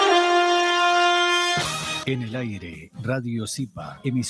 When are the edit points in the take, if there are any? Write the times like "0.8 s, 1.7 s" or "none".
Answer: 2.1 s

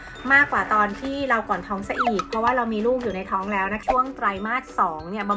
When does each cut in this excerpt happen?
3.8 s

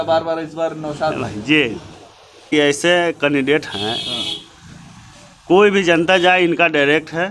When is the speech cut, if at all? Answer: 2.5 s

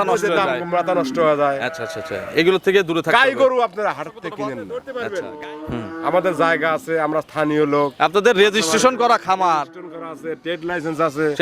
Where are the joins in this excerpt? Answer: 4.7 s

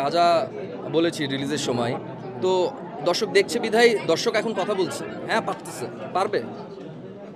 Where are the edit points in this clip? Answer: 5.2 s

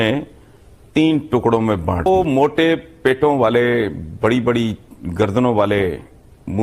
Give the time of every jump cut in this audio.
2.1 s

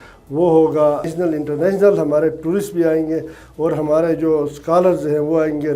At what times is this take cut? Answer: 1.1 s

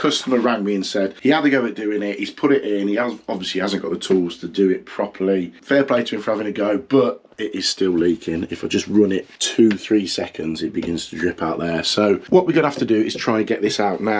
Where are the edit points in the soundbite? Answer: 1.1 s, 5.6 s, 9.4 s, 12.2 s

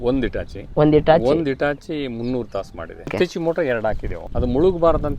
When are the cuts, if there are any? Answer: 3.1 s, 4.2 s

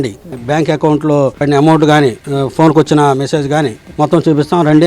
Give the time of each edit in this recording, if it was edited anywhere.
1.4 s, 2.3 s, 3.8 s

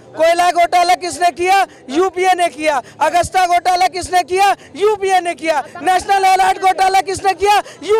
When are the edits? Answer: none

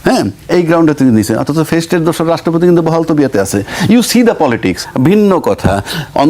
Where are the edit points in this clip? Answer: 4.9 s

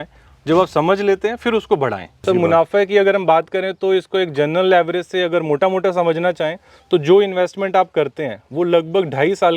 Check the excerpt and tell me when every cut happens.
2.2 s

